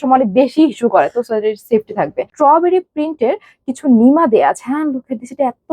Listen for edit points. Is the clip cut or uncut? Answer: cut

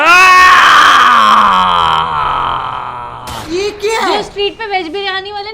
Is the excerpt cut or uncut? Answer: uncut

